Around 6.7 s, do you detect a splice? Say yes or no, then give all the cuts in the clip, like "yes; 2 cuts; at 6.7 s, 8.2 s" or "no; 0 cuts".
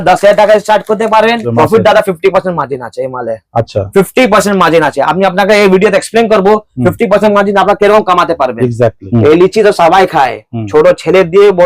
no; 2 cuts; at 1.4 s, 9.0 s